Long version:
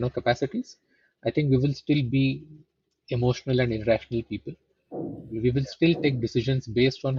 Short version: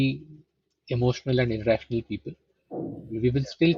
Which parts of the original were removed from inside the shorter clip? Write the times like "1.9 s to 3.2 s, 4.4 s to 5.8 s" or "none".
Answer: none